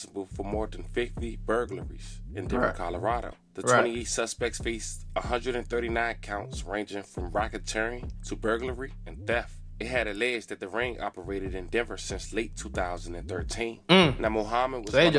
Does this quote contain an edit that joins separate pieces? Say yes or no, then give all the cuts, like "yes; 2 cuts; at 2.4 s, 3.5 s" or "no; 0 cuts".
no; 0 cuts